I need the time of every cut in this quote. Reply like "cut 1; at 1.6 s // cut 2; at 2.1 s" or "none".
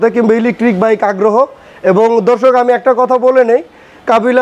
none